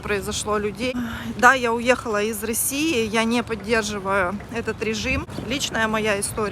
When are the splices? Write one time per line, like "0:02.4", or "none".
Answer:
0:00.9
0:05.3